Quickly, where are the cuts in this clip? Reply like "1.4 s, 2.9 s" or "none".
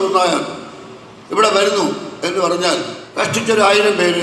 3.0 s